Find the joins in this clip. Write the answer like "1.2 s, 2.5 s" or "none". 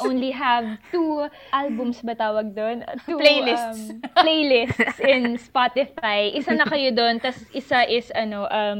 1.4 s